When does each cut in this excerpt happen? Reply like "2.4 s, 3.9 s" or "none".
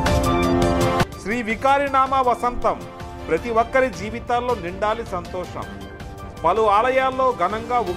1.0 s